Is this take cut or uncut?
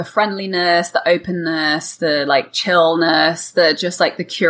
uncut